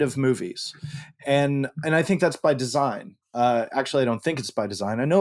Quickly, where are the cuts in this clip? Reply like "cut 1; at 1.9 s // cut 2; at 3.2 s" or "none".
none